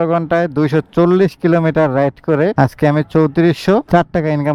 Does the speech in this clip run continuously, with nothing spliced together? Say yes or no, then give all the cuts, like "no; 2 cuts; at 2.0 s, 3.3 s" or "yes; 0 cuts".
yes; 0 cuts